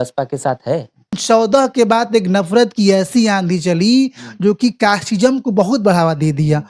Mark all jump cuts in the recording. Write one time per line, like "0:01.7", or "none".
0:01.2